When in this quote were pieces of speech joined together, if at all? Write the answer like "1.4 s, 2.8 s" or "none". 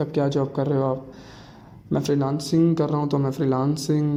none